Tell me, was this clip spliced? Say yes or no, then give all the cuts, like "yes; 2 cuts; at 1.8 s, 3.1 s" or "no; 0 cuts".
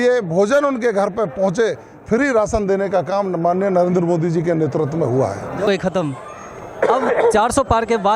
yes; 1 cut; at 5.7 s